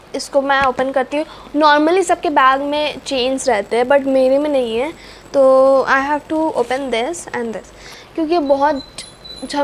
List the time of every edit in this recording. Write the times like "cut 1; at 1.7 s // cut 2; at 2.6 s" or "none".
none